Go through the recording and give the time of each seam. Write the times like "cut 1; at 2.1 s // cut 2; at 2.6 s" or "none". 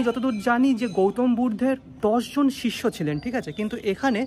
cut 1; at 1.9 s